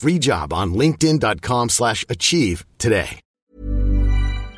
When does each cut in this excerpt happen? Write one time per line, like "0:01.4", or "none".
0:03.2